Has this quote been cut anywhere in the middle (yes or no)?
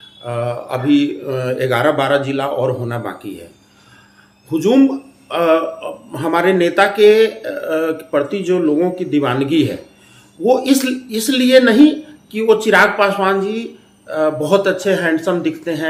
no